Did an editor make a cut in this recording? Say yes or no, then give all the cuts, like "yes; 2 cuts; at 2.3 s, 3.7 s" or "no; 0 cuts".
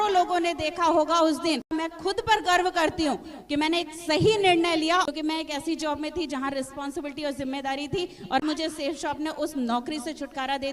yes; 3 cuts; at 1.7 s, 5.1 s, 8.4 s